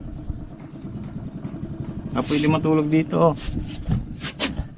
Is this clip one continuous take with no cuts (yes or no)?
yes